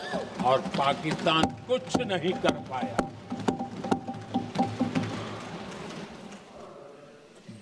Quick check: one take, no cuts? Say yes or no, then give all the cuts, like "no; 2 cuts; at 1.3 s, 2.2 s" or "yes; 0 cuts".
yes; 0 cuts